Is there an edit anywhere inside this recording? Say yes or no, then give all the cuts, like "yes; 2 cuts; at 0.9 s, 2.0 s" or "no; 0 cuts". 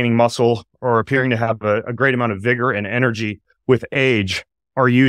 no; 0 cuts